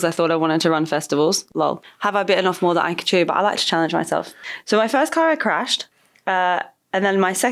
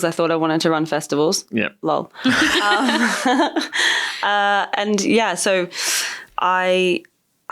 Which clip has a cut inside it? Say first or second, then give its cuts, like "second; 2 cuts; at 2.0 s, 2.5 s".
first; 2 cuts; at 1.5 s, 4.4 s